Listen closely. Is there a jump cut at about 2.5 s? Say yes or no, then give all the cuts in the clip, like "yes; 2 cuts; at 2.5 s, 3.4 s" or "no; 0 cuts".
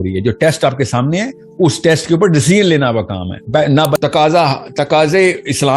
no; 1 cut; at 4.0 s